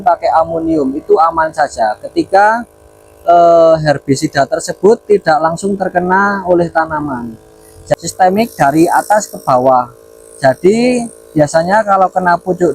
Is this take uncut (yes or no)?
no